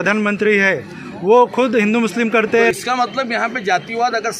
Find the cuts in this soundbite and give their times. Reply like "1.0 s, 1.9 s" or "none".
2.7 s